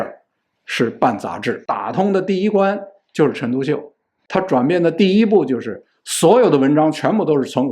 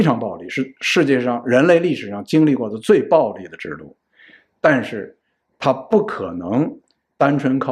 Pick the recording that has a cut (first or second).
first